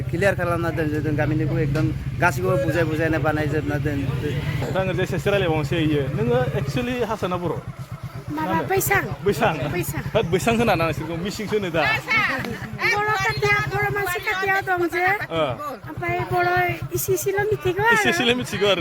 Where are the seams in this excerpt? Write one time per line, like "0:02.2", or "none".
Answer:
0:04.6